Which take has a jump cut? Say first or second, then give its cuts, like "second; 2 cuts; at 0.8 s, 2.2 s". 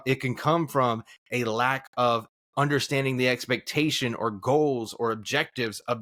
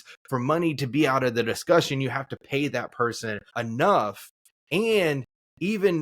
second; 1 cut; at 3.4 s